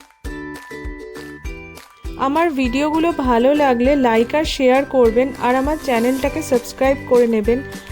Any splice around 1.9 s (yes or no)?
yes